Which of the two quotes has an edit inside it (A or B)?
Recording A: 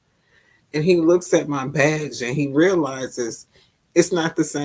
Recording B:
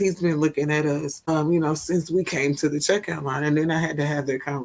B